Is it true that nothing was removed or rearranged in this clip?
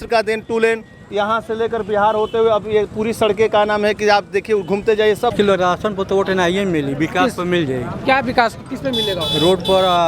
no; 1 cut; at 5.3 s

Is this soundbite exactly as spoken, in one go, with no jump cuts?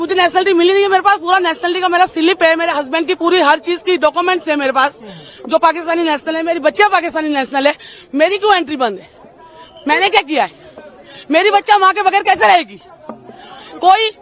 yes; 0 cuts

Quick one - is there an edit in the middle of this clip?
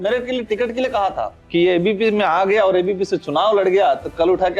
yes; 1 cut; at 1.4 s

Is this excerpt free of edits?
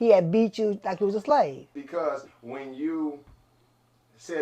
no; 1 cut; at 1.8 s

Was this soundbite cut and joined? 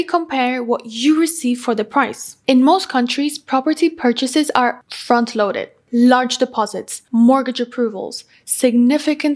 yes; 1 cut; at 2.4 s

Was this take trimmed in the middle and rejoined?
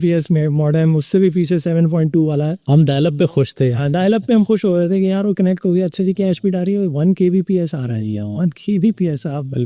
no; 0 cuts

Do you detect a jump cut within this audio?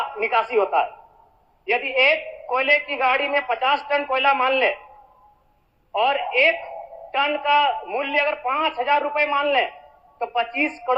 no; 0 cuts

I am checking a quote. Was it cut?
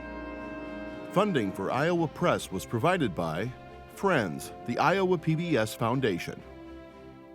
yes; 1 cut; at 1.1 s

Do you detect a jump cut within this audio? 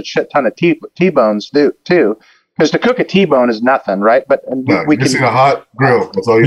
no; 0 cuts

